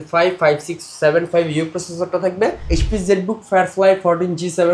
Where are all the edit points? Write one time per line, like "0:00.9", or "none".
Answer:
0:02.6